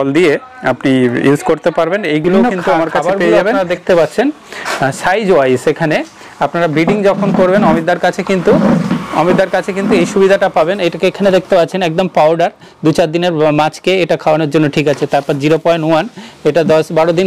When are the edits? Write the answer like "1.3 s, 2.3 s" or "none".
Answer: 3.6 s